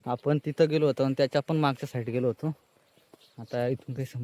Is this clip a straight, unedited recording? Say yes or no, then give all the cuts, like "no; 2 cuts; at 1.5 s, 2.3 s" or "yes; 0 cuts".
yes; 0 cuts